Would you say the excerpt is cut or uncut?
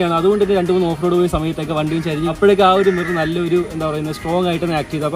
uncut